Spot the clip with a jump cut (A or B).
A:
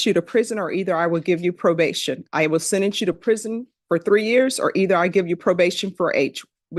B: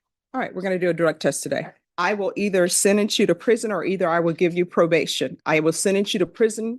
B